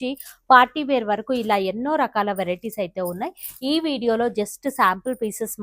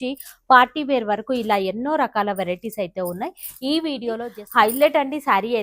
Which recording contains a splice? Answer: second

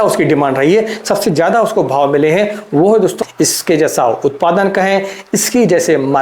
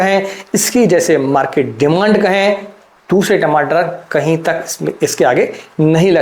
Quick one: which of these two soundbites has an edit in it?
first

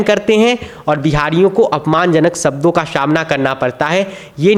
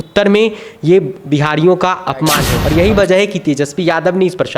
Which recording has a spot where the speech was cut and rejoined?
second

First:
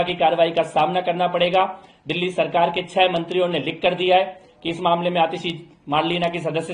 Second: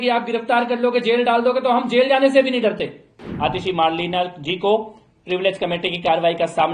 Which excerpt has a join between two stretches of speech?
second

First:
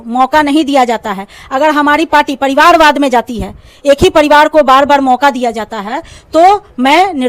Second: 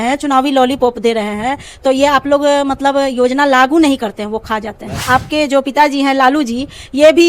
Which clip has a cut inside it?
second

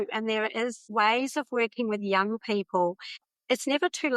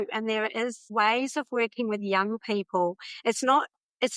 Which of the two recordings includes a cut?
first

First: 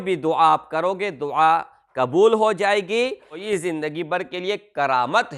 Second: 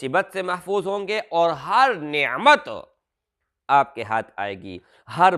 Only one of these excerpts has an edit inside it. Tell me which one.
first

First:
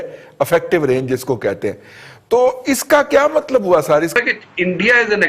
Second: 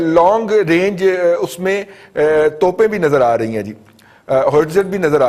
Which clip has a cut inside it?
first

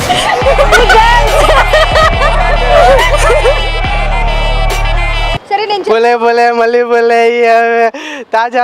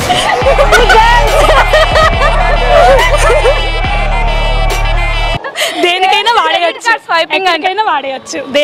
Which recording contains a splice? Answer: first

